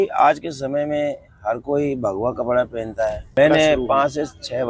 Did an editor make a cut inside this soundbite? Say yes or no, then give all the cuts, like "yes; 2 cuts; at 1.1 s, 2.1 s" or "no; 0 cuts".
yes; 1 cut; at 3.4 s